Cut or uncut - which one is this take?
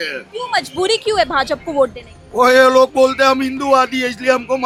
uncut